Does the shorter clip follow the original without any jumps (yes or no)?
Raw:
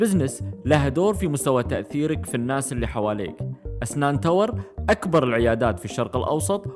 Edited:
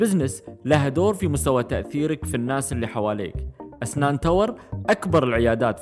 yes